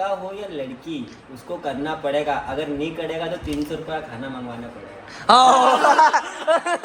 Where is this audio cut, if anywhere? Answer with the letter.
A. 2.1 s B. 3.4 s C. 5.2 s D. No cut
C